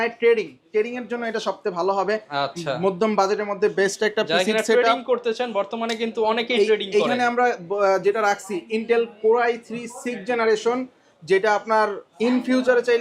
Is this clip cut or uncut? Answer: uncut